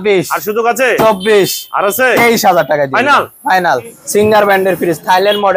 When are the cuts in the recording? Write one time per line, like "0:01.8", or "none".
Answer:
none